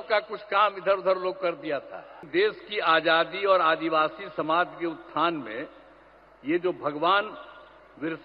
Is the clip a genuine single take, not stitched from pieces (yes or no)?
no